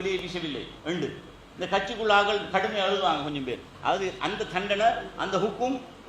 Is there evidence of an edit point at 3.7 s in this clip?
yes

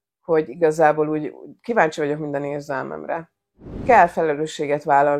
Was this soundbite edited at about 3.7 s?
yes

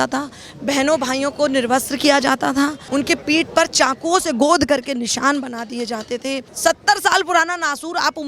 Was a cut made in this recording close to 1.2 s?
no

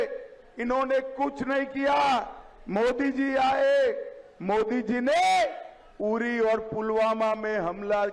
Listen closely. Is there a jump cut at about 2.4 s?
no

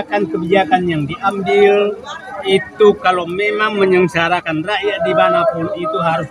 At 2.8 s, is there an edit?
no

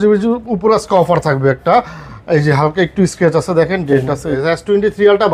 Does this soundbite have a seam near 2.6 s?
no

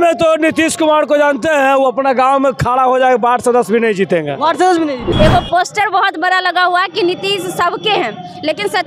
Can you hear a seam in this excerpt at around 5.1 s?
yes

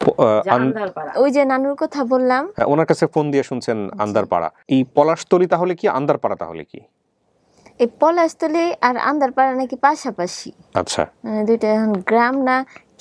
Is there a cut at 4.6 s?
yes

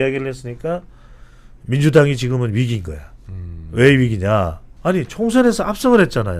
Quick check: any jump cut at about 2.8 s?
no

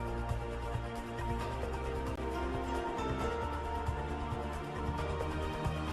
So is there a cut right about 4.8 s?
yes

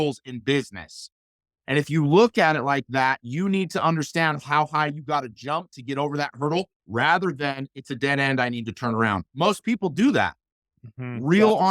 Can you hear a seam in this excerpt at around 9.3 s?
yes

